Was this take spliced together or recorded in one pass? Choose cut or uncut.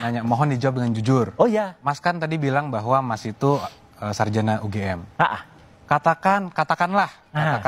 cut